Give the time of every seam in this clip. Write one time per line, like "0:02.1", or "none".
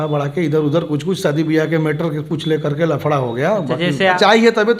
0:03.7